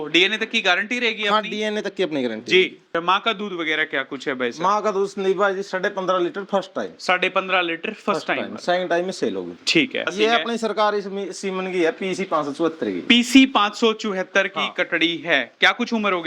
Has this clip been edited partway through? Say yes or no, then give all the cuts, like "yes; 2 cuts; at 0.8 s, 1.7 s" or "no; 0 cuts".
yes; 2 cuts; at 2.9 s, 10.1 s